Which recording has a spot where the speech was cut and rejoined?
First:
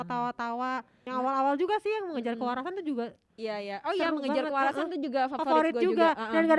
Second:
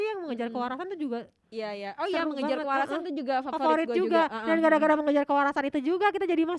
first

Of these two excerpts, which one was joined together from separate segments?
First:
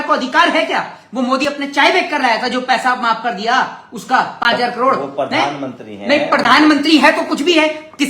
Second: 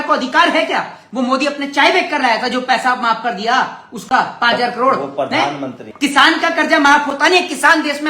second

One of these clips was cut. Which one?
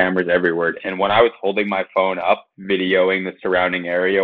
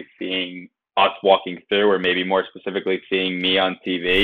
first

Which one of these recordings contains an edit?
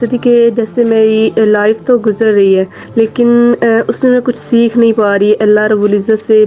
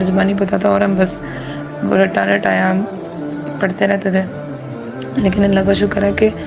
first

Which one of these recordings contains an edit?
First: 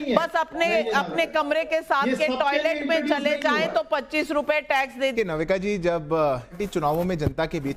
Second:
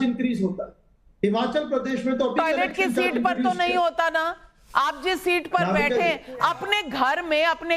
first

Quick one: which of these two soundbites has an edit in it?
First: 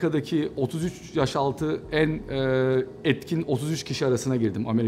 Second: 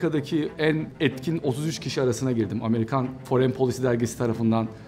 second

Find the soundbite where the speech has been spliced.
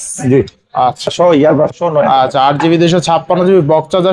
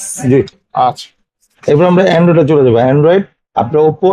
first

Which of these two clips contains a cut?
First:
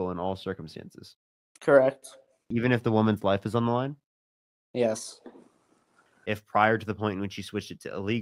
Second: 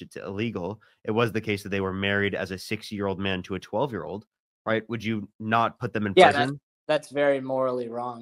first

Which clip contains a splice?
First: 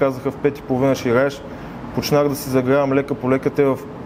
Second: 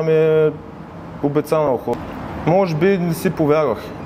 second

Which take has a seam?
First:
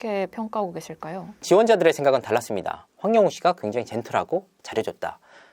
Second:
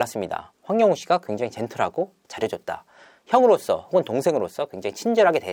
first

